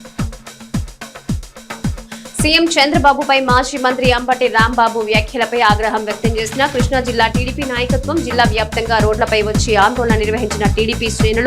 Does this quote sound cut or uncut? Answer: cut